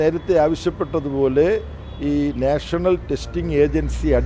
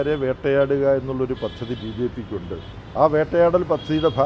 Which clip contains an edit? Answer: second; 1 cut; at 2.8 s

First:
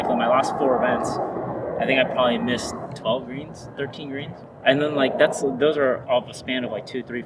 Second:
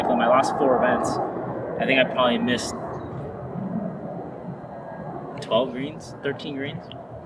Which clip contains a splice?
first; 2 cuts; at 2.9 s, 4.4 s

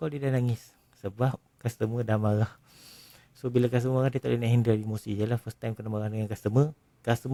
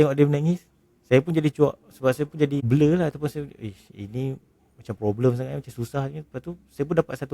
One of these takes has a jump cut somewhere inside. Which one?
second; 1 cut; at 2.6 s

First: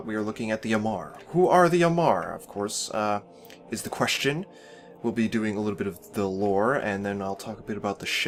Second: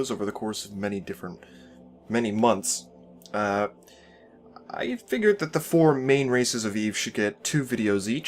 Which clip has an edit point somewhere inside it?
second; 1 cut; at 4.2 s

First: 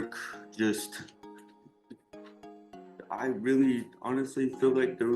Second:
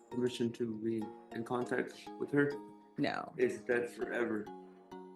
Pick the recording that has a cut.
first; 2 cuts; at 0.9 s, 2.9 s

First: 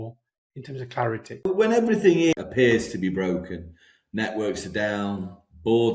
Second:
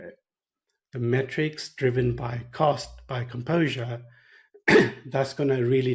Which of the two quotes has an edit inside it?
first; 2 cuts; at 1.5 s, 2.3 s

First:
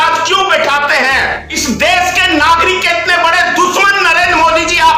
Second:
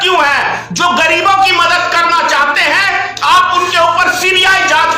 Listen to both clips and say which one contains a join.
first; 1 cut; at 1.5 s

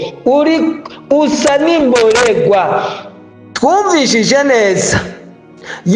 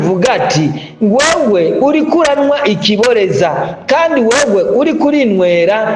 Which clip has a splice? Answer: first; 1 cut; at 3.4 s

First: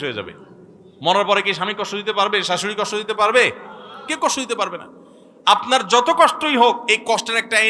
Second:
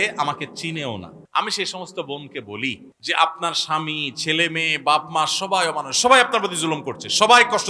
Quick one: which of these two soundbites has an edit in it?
second; 2 cuts; at 1.2 s, 2.9 s

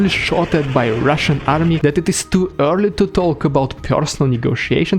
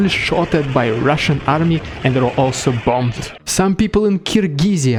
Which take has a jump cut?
first; 1 cut; at 1.8 s

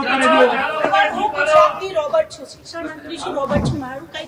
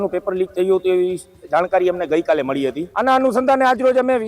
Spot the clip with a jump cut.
second; 1 cut; at 2.9 s

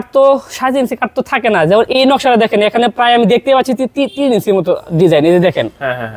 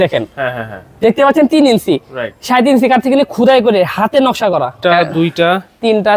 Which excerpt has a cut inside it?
second; 1 cut; at 4.8 s

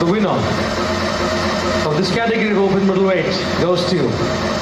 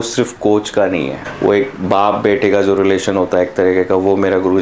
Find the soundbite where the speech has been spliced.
second; 1 cut; at 1.2 s

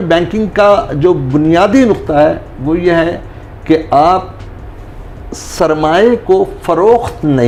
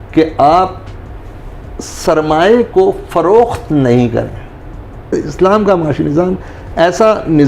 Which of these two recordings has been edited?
second; 1 cut; at 5.1 s

